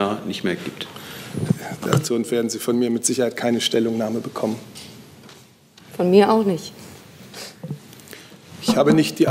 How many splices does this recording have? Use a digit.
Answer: 1